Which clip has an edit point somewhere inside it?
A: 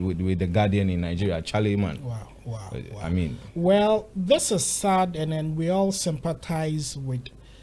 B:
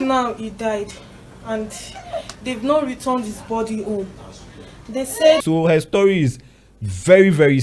B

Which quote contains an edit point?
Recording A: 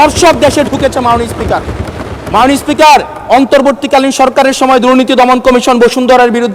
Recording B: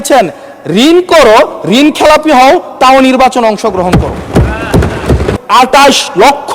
B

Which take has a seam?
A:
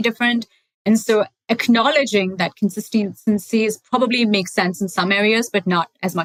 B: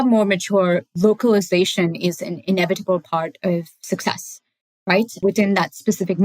B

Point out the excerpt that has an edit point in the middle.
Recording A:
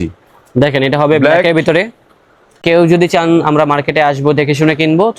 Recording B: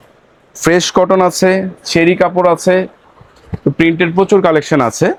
A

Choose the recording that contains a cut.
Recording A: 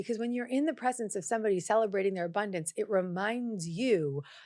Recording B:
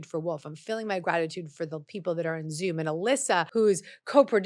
B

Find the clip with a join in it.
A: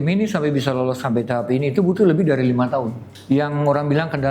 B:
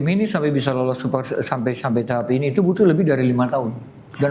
A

